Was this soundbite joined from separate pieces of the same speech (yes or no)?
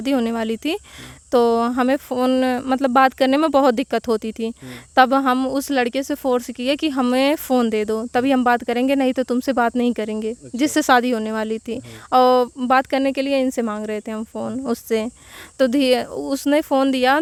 no